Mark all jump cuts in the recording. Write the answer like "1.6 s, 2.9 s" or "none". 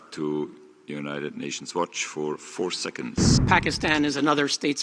3.4 s

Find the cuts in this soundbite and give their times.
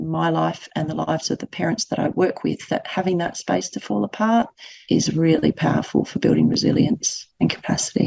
7.2 s

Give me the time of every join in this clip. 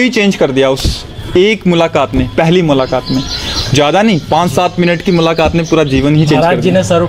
none

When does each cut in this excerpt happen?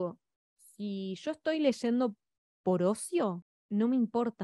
3.5 s

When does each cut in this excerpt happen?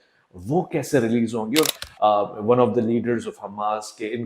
1.8 s

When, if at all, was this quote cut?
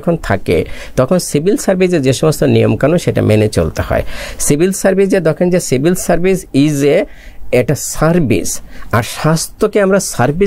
none

